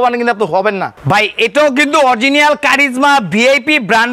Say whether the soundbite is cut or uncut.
cut